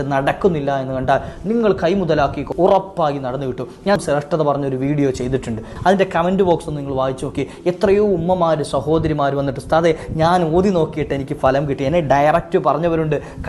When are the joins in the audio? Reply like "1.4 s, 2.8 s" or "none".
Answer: 2.5 s, 4.0 s, 5.7 s